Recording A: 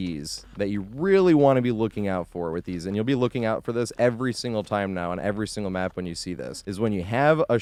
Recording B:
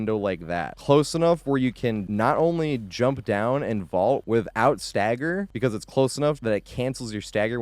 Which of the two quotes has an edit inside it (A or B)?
B